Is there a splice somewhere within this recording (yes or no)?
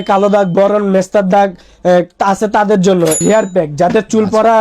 yes